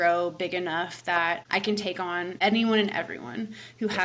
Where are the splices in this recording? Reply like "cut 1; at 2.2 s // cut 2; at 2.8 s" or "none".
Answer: cut 1; at 1.7 s